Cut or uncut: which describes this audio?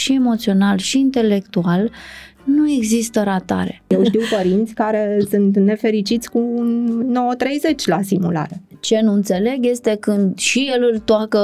cut